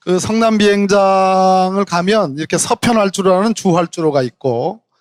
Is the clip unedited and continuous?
yes; 0 cuts

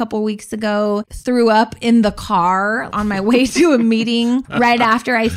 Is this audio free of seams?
no; 3 cuts; at 1.1 s, 2.9 s, 4.4 s

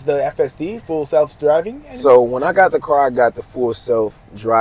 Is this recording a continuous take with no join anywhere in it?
yes; 0 cuts

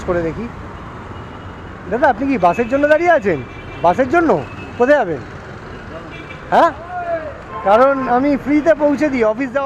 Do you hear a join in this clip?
no; 0 cuts

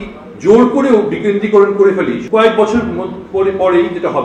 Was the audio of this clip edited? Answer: yes; 1 cut; at 2.2 s

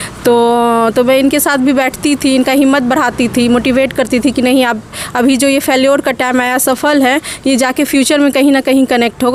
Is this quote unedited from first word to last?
yes; 0 cuts

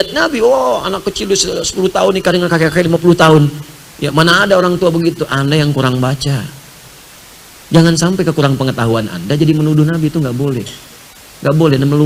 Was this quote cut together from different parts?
no; 0 cuts

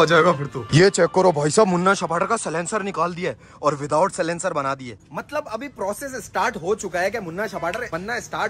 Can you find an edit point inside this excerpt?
no; 0 cuts

